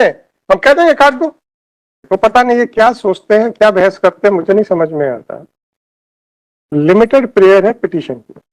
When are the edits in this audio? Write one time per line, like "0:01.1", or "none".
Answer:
0:02.0